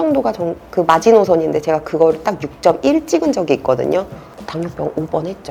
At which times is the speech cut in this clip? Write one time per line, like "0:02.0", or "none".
none